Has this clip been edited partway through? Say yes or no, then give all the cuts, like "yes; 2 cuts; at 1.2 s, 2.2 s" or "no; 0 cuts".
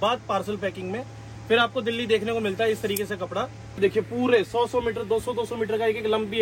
yes; 1 cut; at 3.8 s